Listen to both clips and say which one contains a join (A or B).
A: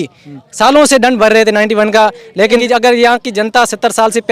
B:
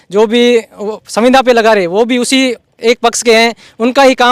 A